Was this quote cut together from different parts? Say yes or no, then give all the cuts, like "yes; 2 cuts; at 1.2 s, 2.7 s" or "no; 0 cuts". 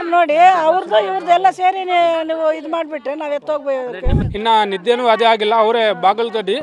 yes; 1 cut; at 4.2 s